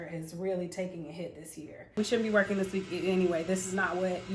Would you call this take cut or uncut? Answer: cut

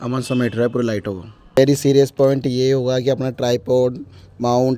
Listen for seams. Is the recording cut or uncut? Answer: cut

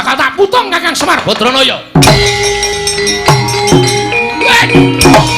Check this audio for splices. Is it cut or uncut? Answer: cut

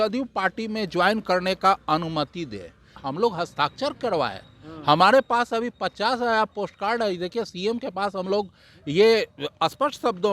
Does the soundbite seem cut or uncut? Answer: cut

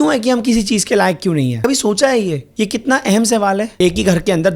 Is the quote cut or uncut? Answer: cut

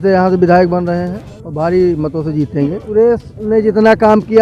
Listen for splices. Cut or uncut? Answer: cut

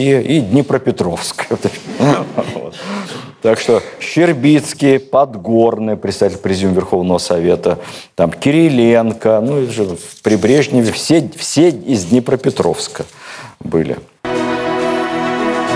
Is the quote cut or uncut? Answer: uncut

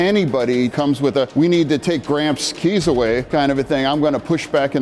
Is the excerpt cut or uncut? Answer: cut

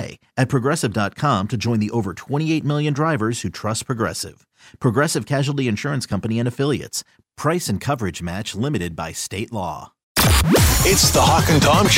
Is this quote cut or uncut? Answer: cut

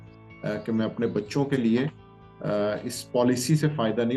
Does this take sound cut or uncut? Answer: uncut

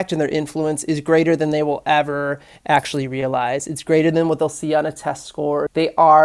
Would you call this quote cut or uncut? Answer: uncut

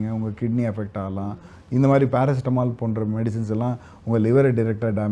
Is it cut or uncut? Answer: uncut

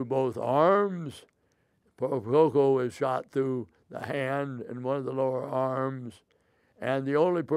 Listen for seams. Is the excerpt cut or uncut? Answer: uncut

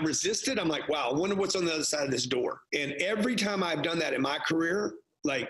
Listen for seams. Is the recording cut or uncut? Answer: cut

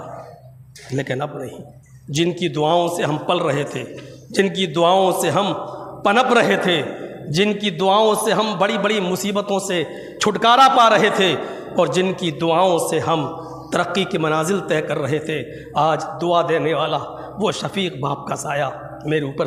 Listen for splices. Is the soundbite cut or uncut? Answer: uncut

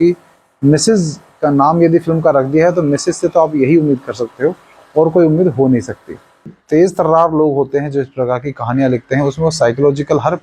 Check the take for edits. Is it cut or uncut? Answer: cut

